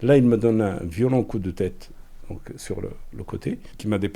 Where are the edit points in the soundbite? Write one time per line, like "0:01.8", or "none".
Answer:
none